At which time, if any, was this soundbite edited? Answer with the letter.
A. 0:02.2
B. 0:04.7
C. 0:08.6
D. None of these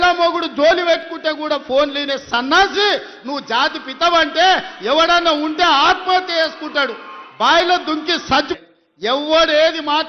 C